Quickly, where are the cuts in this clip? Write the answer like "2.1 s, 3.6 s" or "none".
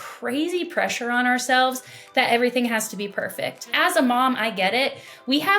3.7 s